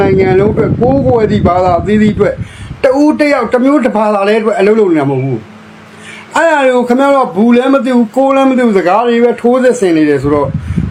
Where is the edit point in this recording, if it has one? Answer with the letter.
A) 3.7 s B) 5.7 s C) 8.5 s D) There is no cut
D